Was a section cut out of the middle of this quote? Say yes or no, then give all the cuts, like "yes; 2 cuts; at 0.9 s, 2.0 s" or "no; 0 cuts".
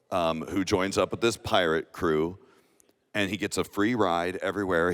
no; 0 cuts